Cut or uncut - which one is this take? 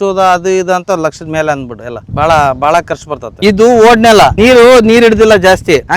cut